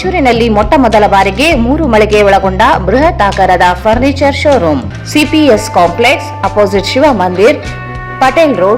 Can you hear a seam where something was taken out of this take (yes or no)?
yes